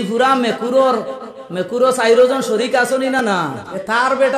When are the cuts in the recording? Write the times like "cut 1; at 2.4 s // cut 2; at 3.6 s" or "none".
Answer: cut 1; at 3.2 s